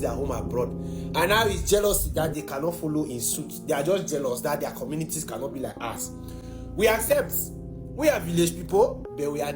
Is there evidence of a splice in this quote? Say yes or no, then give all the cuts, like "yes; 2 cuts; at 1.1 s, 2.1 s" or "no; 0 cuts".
no; 0 cuts